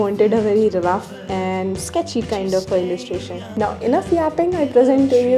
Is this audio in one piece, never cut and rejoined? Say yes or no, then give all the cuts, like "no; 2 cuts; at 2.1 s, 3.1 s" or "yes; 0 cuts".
no; 1 cut; at 3.4 s